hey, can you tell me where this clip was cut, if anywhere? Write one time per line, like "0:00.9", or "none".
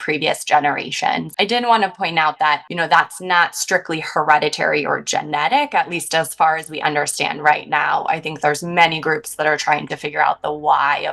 0:01.3
0:02.7